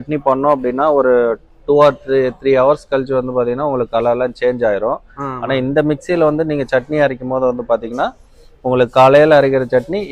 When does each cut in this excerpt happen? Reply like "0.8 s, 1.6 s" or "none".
none